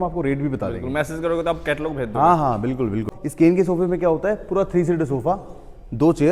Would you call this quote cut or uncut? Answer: cut